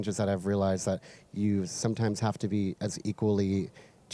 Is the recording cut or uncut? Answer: uncut